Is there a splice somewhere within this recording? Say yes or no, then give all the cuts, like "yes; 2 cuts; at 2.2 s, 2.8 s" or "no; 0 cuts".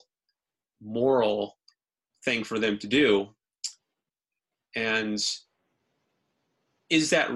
yes; 1 cut; at 4.0 s